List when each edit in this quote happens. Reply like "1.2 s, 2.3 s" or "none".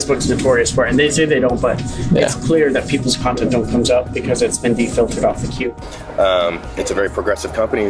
5.6 s